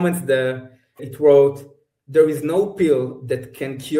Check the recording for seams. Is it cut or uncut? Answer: cut